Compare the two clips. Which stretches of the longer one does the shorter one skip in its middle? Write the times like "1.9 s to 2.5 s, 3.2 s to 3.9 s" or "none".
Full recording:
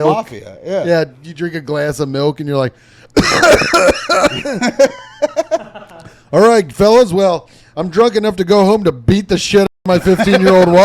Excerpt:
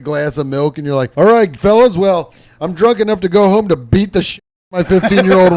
2.7 s to 6.3 s